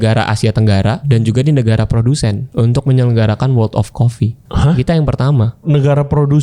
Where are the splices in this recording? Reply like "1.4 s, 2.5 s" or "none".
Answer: 1.0 s, 2.4 s, 4.4 s, 5.6 s